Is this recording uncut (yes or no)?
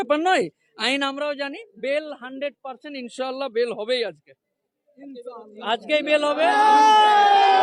yes